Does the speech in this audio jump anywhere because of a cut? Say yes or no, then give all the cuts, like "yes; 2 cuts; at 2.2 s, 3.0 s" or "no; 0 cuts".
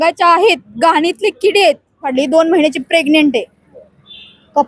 yes; 1 cut; at 2.1 s